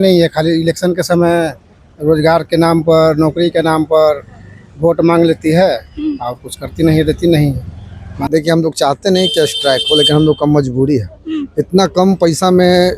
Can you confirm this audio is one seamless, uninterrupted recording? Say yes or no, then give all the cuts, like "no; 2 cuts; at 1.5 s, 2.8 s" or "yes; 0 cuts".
no; 1 cut; at 8.3 s